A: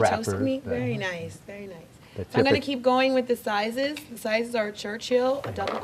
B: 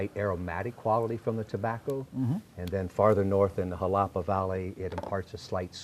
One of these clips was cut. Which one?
B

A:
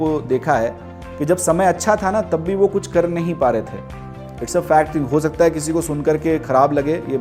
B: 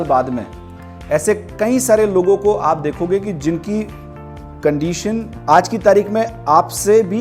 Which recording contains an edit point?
B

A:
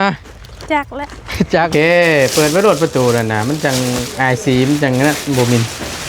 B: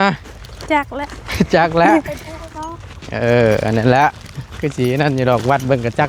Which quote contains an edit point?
A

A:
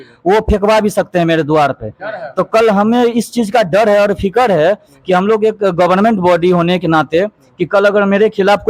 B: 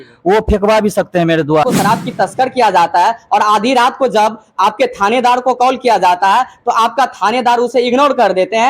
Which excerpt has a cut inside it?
B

